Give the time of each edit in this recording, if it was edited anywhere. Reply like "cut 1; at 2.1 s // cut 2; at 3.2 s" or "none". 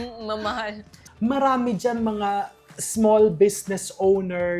cut 1; at 1.0 s